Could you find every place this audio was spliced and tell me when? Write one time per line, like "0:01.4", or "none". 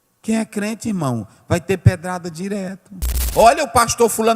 0:03.2